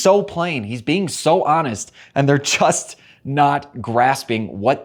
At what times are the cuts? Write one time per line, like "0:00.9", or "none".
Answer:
none